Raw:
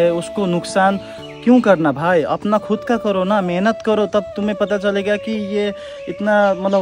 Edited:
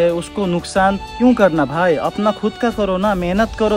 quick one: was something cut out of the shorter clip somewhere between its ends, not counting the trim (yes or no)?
yes